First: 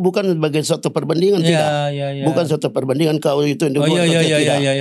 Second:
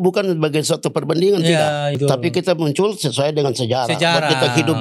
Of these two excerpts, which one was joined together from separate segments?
second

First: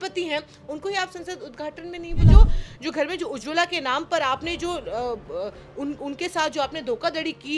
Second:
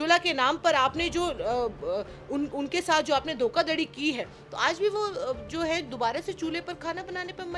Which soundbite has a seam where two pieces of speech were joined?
first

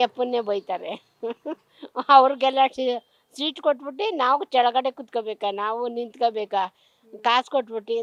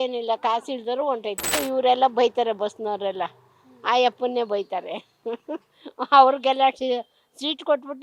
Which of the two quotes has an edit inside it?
second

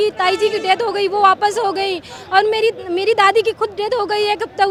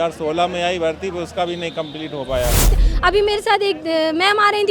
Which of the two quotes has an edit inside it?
second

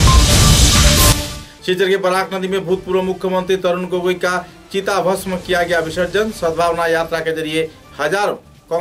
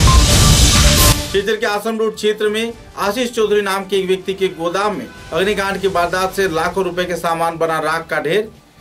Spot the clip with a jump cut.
first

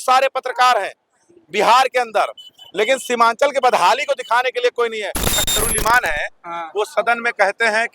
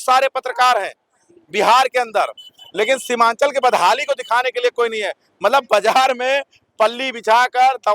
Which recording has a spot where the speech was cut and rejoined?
first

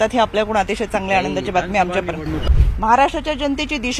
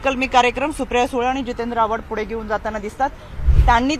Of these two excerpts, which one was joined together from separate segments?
first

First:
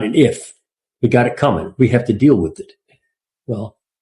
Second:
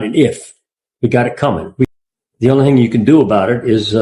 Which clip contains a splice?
second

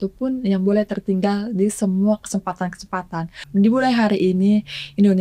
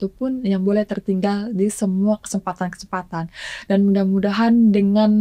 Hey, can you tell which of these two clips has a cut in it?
first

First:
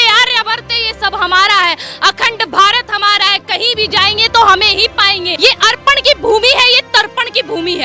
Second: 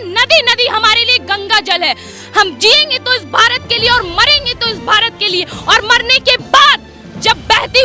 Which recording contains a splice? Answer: first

